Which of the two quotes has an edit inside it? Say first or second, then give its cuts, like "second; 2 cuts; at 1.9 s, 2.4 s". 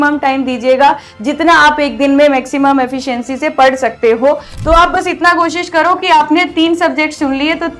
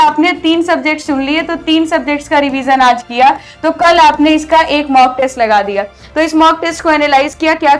first; 1 cut; at 4.5 s